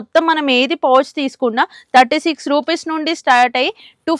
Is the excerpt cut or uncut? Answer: uncut